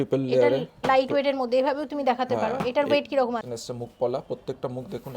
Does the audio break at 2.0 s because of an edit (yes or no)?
no